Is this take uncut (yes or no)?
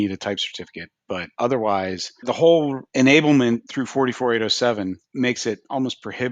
no